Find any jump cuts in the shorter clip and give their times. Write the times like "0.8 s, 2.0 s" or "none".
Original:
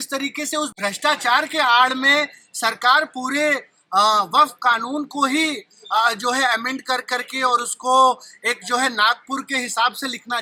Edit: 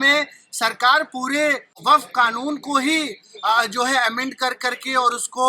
1.8 s